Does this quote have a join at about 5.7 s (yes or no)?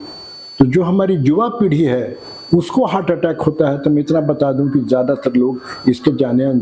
no